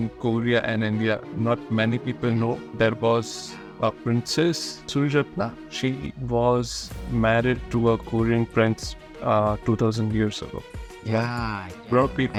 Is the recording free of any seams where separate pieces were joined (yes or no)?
yes